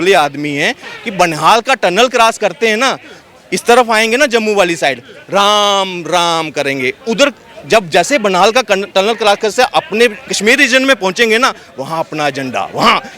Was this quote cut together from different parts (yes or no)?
yes